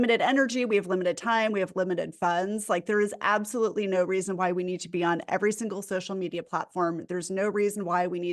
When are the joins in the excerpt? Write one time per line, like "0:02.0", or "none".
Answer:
none